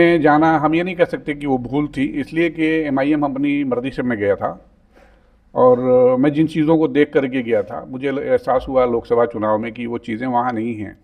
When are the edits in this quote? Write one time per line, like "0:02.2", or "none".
none